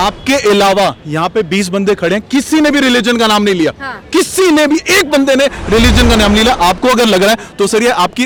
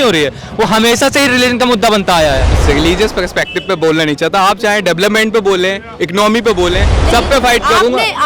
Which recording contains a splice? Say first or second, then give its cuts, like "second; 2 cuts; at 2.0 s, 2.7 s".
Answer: second; 1 cut; at 2.5 s